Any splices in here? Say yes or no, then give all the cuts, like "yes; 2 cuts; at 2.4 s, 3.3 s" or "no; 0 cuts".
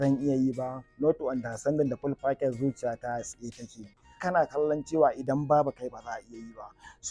yes; 1 cut; at 4.2 s